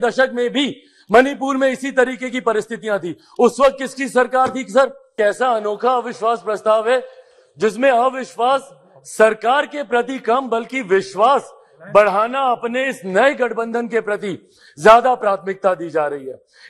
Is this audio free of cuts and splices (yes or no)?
no